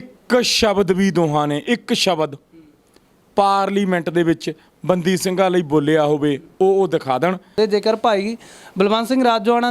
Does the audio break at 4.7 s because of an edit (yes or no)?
no